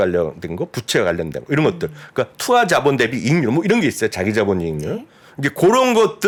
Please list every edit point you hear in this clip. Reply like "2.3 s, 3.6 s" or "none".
none